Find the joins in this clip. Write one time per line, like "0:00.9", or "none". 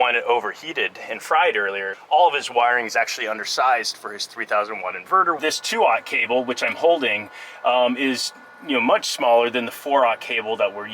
0:01.9
0:05.4